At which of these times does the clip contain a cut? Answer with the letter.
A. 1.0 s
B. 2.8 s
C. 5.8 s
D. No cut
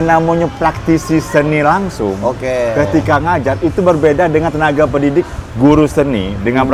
D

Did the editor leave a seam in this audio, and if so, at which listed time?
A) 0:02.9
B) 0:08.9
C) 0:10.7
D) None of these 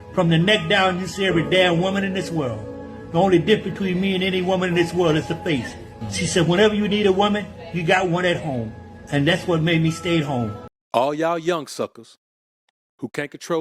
C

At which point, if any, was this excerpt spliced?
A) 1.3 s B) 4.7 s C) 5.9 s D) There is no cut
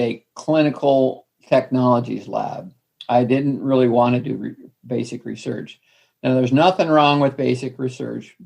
A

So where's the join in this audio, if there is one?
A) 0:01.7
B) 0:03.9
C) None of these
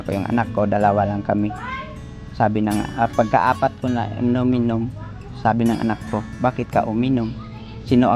C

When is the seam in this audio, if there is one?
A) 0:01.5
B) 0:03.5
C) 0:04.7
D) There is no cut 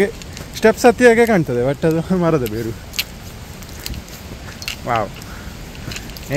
D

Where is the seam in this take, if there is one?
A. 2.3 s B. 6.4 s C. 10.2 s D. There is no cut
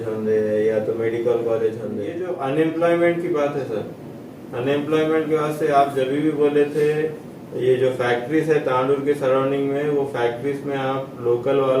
A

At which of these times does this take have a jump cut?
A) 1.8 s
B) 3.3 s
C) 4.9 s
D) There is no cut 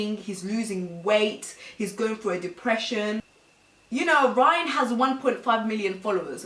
B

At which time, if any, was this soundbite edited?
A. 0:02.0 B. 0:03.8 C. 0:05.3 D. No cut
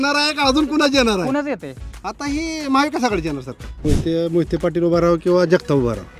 B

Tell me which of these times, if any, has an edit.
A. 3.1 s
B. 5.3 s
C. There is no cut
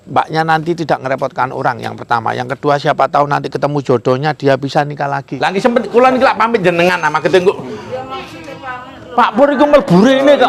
B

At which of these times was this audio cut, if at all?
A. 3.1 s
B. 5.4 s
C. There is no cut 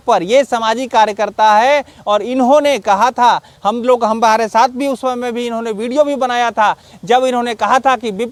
C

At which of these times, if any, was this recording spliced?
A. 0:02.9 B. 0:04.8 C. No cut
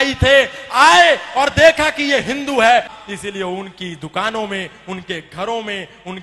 A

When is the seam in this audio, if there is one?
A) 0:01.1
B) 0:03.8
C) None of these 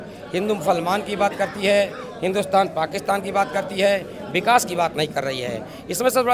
C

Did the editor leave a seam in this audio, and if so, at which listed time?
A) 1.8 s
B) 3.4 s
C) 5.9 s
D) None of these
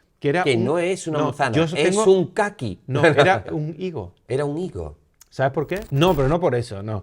C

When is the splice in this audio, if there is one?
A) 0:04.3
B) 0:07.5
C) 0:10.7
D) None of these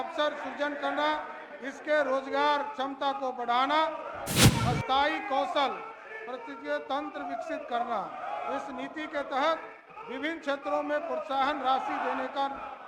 A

